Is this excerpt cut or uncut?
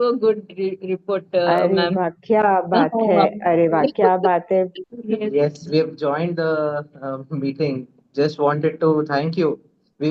uncut